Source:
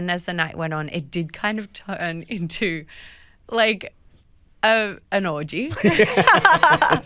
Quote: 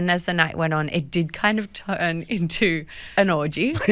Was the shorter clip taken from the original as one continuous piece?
no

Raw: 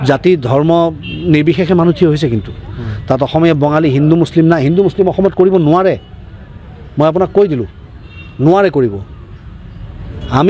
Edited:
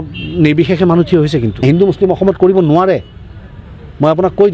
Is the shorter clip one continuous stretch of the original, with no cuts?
no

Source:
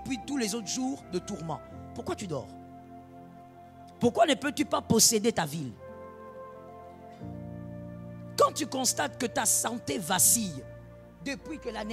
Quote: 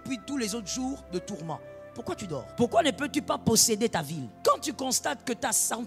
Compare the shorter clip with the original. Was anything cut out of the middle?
yes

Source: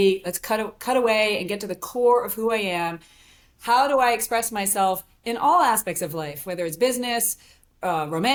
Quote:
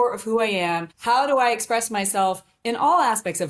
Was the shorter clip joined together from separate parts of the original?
yes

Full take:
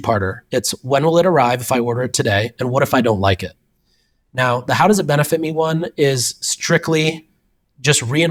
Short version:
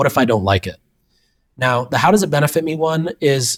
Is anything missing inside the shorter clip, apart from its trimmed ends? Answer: no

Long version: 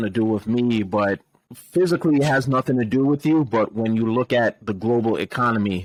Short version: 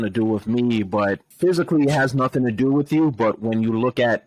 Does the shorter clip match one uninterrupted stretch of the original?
no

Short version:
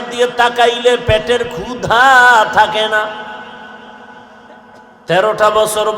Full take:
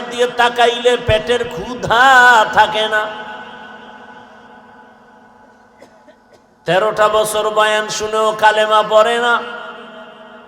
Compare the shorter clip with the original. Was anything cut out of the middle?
yes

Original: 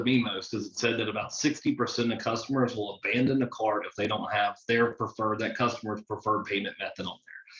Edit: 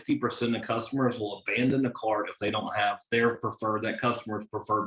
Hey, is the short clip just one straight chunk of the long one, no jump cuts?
yes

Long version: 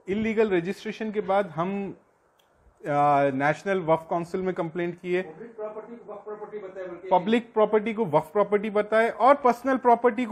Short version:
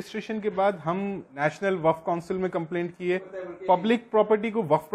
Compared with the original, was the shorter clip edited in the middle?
yes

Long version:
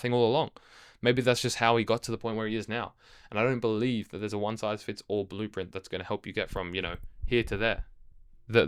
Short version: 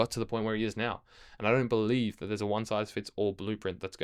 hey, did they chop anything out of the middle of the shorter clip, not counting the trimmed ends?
no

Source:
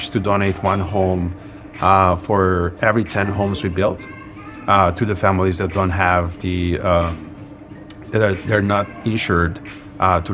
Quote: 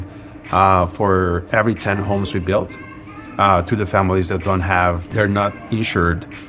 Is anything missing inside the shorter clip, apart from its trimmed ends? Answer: yes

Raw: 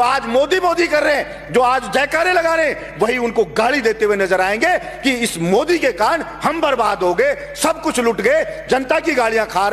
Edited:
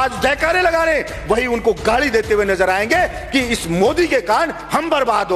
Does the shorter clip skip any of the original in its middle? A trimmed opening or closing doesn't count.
no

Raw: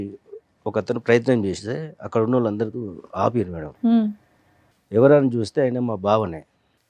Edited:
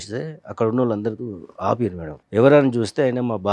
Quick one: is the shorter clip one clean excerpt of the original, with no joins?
no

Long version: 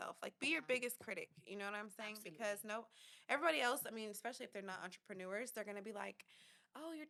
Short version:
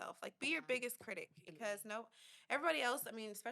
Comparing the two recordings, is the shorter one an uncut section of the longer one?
no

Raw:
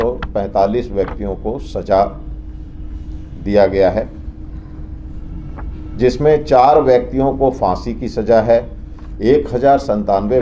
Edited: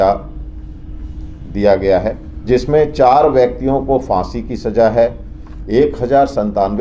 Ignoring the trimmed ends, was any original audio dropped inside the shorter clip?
yes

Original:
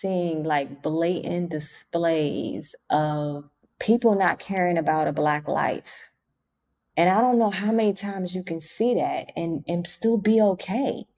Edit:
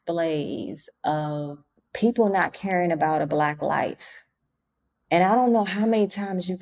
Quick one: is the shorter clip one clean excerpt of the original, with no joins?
yes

